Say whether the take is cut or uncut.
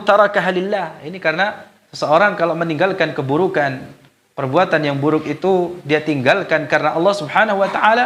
uncut